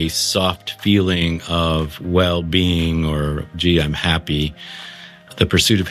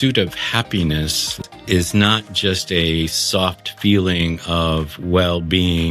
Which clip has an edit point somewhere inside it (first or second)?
second